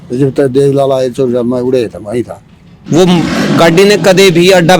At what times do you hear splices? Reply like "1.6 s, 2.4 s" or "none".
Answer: 2.5 s